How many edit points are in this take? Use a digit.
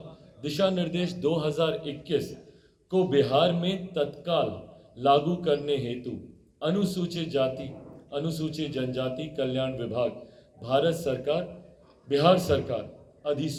0